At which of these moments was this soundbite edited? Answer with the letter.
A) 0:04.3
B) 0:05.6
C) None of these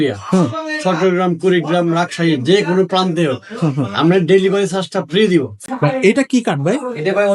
B